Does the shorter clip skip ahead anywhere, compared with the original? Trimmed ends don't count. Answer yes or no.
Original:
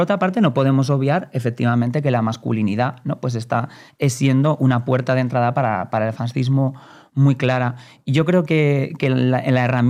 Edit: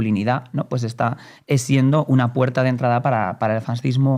no